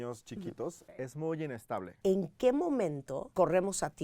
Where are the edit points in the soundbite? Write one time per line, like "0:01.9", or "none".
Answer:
0:00.9
0:01.9
0:03.2